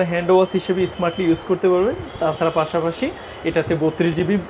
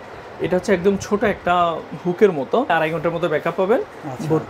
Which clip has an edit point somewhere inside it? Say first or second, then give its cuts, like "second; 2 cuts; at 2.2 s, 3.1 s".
second; 1 cut; at 2.7 s